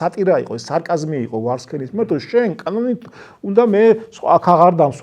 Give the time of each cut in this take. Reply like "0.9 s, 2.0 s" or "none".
none